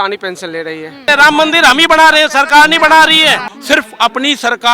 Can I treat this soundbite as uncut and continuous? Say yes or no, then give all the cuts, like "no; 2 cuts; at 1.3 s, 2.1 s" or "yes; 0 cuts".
no; 2 cuts; at 1.0 s, 3.5 s